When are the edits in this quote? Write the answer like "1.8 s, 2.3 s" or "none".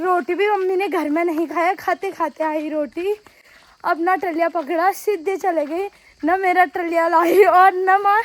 none